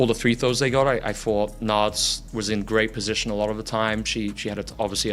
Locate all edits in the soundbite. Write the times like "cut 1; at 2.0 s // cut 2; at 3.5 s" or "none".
cut 1; at 4.1 s